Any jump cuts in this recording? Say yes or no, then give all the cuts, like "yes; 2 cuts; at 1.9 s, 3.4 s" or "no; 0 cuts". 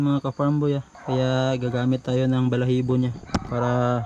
yes; 1 cut; at 0.9 s